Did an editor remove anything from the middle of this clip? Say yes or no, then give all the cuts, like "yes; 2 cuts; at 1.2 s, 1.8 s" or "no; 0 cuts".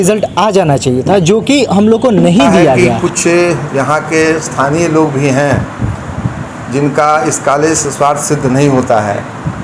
yes; 1 cut; at 2.9 s